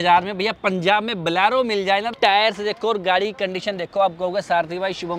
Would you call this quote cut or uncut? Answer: cut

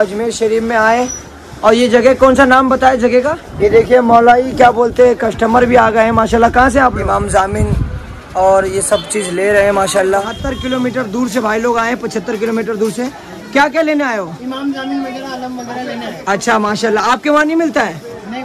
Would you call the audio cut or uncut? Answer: cut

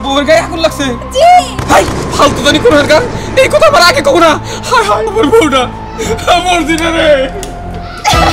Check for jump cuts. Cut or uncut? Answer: uncut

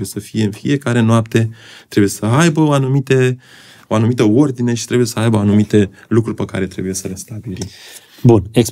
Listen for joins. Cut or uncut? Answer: uncut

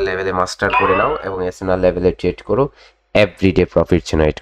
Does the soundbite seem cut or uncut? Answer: uncut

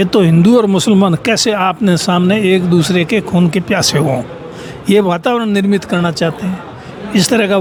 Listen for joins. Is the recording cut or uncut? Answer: uncut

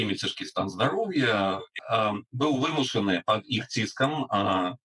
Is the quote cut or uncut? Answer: cut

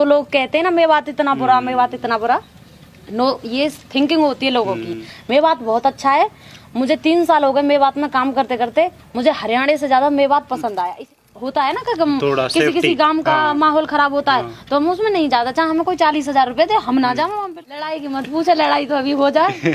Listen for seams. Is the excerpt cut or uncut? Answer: cut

